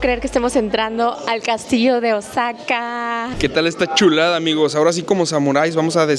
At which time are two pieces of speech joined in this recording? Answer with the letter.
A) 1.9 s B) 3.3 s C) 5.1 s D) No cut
B